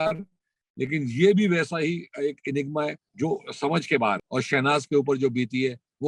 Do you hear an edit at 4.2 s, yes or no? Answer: yes